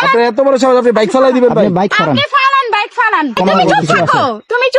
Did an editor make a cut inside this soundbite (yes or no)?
yes